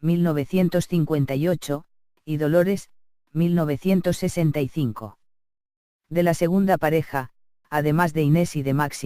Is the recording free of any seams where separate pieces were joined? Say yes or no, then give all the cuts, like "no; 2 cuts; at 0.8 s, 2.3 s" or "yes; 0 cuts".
no; 1 cut; at 6.8 s